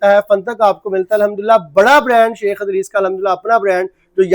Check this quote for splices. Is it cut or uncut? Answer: uncut